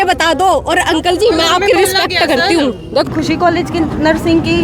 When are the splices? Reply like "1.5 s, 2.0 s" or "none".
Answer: 3.1 s